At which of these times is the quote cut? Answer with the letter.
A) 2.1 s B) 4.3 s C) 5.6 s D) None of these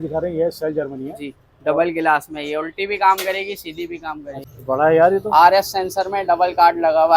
B